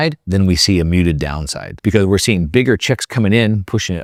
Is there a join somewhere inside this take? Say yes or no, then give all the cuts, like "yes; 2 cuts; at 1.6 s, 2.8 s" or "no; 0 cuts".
no; 0 cuts